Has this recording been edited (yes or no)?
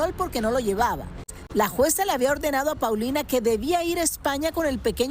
yes